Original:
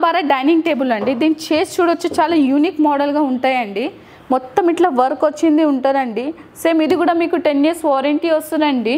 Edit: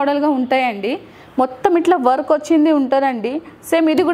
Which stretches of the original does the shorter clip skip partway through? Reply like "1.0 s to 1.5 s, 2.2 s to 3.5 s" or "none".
none